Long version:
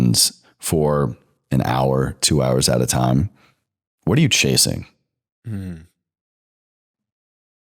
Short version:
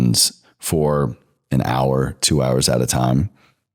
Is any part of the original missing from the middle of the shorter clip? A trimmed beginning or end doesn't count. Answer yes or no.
no